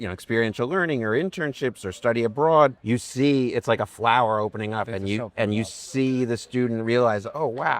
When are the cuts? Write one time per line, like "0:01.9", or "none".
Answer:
0:02.8